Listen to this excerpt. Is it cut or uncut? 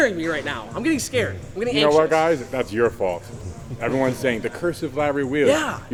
uncut